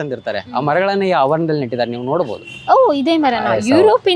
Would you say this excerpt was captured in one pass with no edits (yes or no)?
yes